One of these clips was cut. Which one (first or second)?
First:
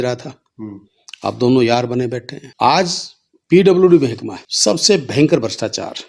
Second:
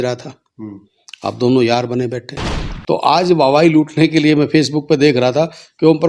second